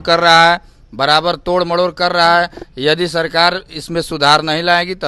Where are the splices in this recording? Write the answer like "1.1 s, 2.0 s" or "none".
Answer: none

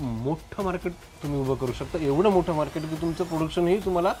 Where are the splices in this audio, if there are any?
none

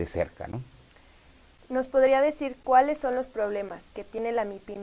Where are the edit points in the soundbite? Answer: none

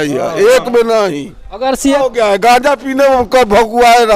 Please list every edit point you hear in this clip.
2.0 s

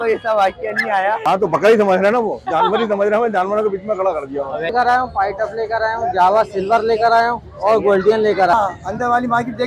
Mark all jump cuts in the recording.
1.3 s, 4.7 s, 8.5 s

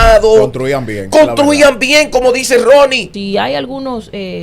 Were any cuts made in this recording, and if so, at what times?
3.1 s

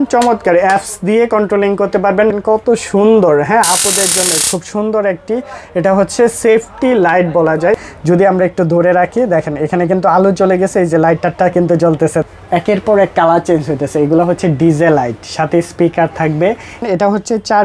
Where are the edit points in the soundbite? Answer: 2.3 s, 7.8 s, 12.2 s, 16.8 s

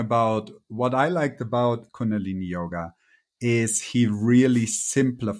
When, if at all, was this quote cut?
1.9 s

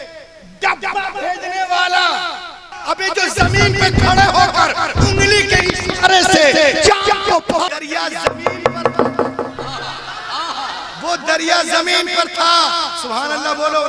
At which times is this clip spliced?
2.7 s, 7.7 s

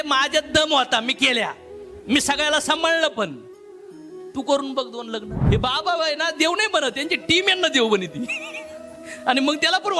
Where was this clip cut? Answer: 5.3 s

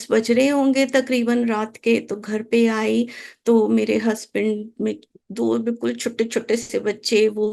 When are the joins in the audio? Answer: none

